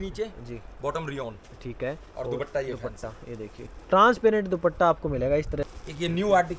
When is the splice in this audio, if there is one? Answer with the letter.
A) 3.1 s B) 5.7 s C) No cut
B